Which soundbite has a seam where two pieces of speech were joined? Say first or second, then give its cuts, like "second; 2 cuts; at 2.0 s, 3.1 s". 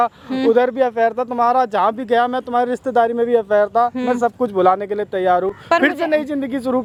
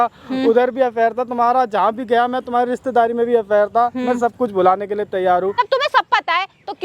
second; 1 cut; at 5.5 s